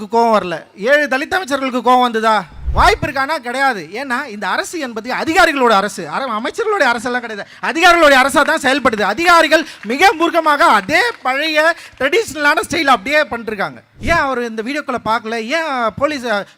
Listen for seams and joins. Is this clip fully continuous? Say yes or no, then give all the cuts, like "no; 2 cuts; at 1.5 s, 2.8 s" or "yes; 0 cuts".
no; 2 cuts; at 2.6 s, 13.9 s